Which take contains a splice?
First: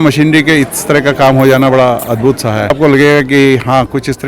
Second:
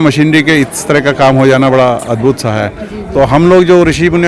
first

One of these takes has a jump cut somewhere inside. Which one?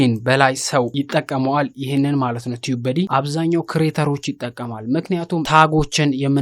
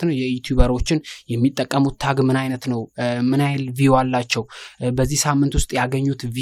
first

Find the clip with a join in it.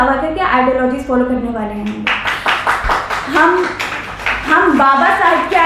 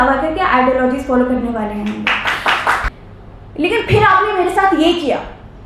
second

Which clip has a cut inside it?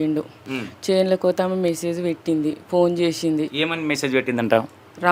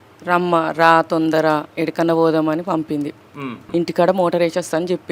second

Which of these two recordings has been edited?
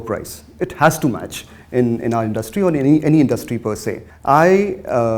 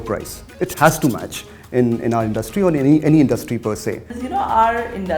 second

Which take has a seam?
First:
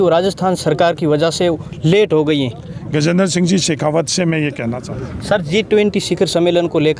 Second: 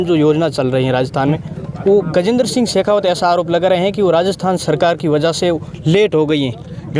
first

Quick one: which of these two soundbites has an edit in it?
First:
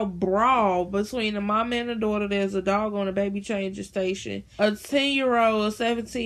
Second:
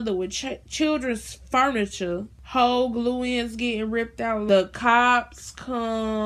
second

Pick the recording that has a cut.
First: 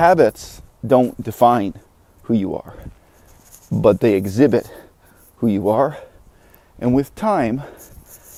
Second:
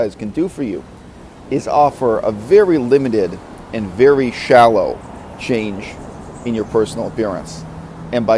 second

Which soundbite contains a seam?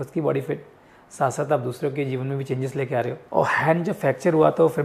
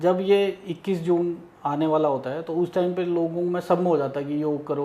first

